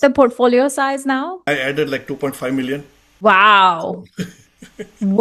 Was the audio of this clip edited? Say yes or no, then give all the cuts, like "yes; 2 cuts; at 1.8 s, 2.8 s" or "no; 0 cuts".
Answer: yes; 2 cuts; at 1.5 s, 3.2 s